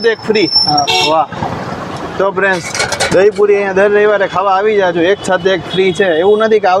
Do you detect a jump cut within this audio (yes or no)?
no